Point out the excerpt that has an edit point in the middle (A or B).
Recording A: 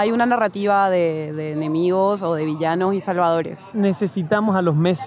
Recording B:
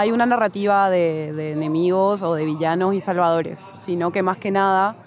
A